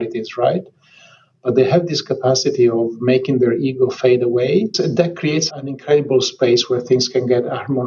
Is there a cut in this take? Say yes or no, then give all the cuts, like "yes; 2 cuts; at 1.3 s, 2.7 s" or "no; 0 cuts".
yes; 1 cut; at 5.5 s